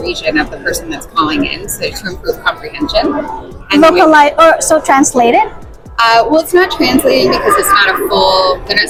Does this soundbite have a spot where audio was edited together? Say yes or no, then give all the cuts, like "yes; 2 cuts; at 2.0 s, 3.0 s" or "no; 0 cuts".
no; 0 cuts